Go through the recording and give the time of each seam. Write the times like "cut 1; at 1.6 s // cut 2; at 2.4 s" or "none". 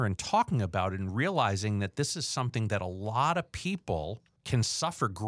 cut 1; at 4.3 s